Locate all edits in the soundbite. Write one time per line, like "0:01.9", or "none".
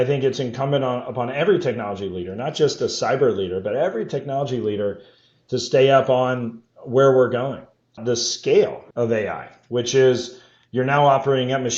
0:08.0
0:08.8